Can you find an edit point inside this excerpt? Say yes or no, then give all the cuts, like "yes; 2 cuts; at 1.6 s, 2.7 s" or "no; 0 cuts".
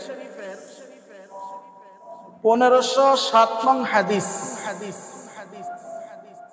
yes; 1 cut; at 5.5 s